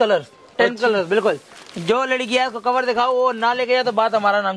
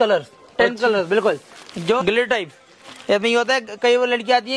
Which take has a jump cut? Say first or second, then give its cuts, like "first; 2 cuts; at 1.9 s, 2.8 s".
second; 1 cut; at 2.0 s